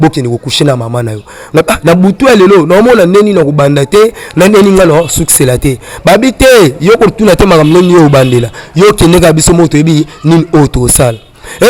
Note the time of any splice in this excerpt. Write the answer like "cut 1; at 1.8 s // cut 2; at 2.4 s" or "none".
none